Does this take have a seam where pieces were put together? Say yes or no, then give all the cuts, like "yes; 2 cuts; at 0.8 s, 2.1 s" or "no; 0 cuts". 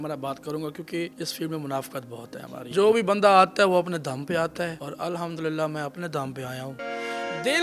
yes; 4 cuts; at 1.1 s, 2.7 s, 4.8 s, 6.8 s